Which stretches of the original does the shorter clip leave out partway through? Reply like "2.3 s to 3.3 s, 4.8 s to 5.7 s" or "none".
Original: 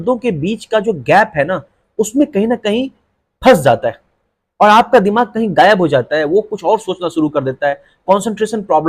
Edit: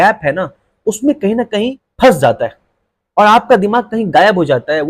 3.0 s to 3.3 s